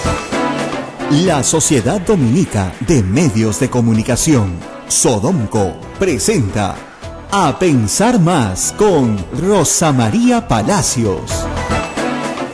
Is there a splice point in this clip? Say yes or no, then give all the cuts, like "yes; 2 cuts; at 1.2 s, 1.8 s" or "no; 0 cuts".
yes; 1 cut; at 0.9 s